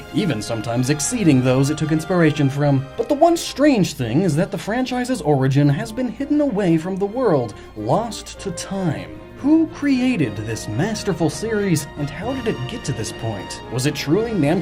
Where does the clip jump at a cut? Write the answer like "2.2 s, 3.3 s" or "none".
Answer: none